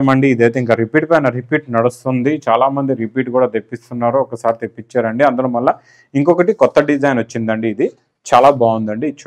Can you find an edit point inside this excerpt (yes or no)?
no